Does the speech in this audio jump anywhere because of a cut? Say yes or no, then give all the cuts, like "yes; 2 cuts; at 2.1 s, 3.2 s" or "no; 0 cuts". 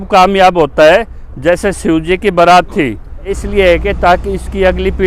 yes; 1 cut; at 3.4 s